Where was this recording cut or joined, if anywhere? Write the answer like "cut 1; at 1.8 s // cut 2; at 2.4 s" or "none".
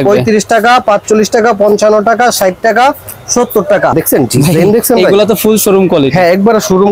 cut 1; at 3.9 s